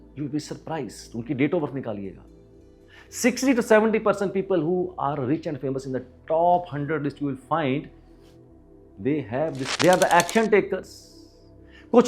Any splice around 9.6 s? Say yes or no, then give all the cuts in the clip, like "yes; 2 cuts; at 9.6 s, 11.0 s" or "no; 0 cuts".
yes; 1 cut; at 9.6 s